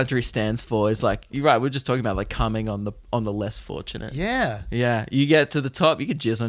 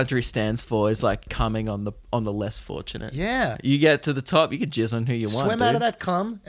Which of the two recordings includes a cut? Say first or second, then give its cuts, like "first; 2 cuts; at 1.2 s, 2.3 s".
second; 2 cuts; at 1.3 s, 3.6 s